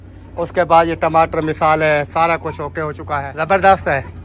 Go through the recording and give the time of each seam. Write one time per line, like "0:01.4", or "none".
0:03.3